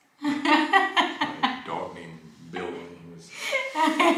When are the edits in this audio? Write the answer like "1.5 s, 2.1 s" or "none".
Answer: none